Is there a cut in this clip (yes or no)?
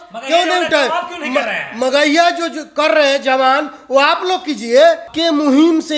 yes